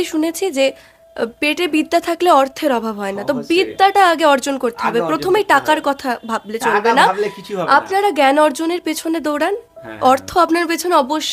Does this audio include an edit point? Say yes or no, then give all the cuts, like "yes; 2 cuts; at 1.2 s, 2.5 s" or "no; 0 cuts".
no; 0 cuts